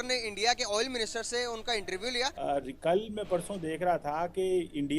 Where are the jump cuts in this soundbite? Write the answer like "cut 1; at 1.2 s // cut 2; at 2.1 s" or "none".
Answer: cut 1; at 2.3 s